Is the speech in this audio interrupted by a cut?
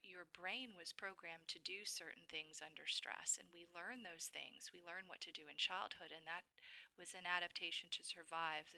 no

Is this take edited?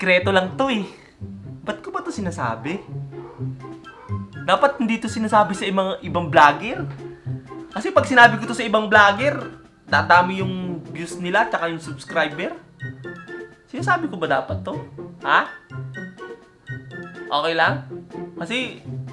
yes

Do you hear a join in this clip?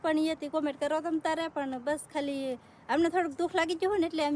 no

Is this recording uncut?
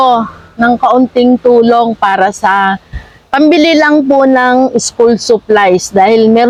yes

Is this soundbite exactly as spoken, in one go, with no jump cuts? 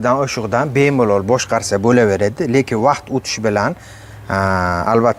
yes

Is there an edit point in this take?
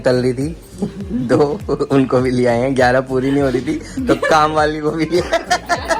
no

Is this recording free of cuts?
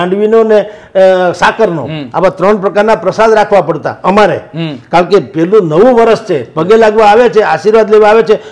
yes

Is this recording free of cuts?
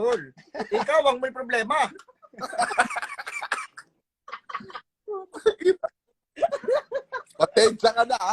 yes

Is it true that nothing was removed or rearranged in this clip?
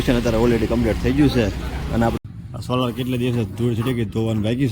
no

